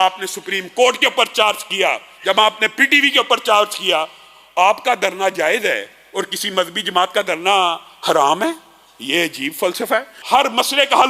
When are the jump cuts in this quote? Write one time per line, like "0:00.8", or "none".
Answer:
0:10.1